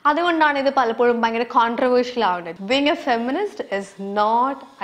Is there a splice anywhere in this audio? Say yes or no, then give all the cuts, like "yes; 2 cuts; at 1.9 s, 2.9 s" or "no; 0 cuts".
yes; 1 cut; at 2.5 s